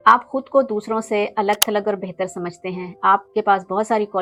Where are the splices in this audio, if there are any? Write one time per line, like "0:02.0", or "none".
none